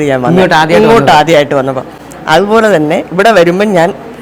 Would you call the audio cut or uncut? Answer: uncut